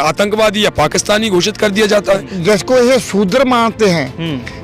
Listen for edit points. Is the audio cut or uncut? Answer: cut